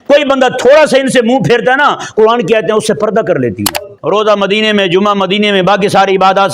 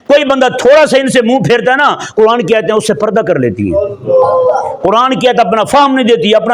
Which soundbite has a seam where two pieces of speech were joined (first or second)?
first